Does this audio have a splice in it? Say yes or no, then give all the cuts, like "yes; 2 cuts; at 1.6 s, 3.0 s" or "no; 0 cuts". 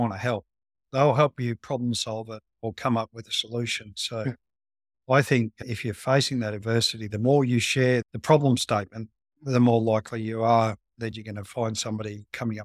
no; 0 cuts